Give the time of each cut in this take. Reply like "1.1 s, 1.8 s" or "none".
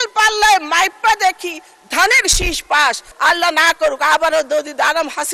3.1 s